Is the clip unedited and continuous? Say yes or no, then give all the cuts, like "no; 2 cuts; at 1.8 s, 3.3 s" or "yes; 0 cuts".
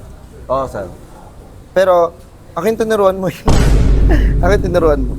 yes; 0 cuts